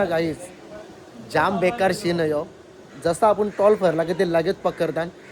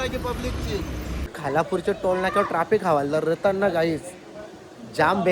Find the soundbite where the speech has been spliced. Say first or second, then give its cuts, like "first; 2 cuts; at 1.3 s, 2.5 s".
second; 1 cut; at 1.4 s